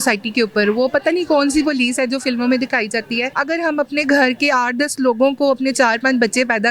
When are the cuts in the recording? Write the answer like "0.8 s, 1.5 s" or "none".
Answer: 3.3 s

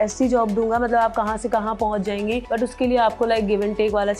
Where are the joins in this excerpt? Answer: 2.4 s

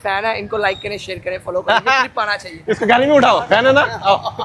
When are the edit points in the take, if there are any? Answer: 2.1 s

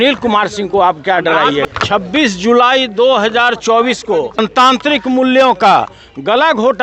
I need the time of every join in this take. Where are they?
1.6 s, 4.5 s

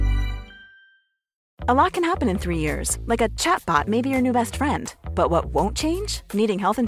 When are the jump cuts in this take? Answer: 1.4 s

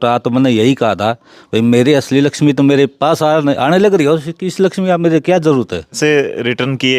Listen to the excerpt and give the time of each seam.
6.0 s

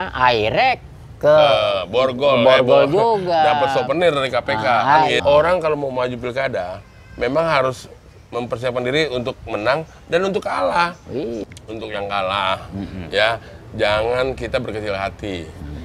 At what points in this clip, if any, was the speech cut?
5.1 s, 11.4 s

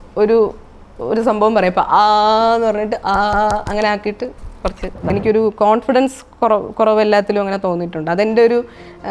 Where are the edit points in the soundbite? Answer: 5.1 s

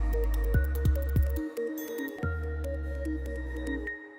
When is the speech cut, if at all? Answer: 2.1 s

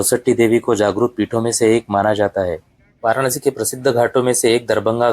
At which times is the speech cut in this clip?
2.9 s

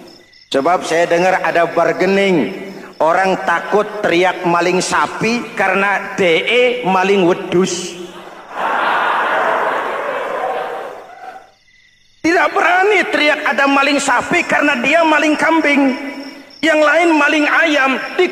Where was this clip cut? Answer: none

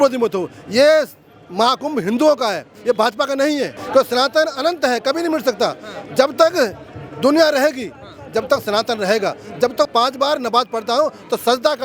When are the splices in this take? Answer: 3.8 s, 9.9 s

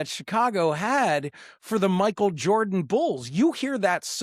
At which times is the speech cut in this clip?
none

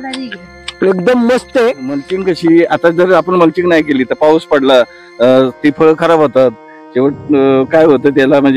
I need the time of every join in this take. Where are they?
2.1 s

